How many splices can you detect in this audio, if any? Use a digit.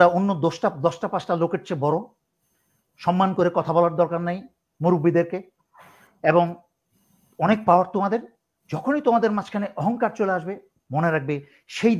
0